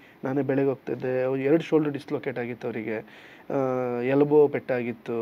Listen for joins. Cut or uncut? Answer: uncut